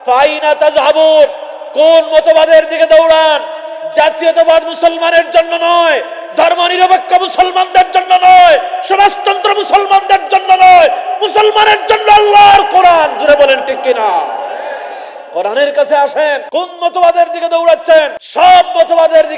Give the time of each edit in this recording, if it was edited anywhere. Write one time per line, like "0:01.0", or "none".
0:16.4
0:18.2